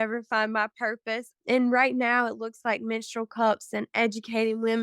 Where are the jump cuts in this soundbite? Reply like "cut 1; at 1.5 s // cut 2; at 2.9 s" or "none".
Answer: cut 1; at 1.3 s